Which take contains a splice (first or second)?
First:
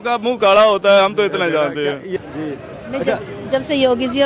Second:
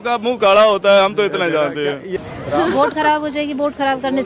first